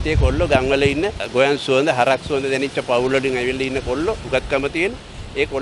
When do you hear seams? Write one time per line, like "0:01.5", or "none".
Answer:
0:01.2
0:04.2